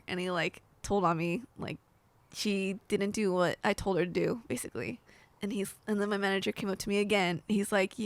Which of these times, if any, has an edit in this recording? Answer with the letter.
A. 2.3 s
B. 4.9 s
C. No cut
C